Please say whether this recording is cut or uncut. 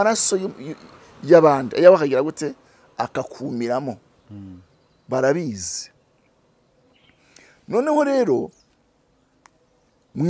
uncut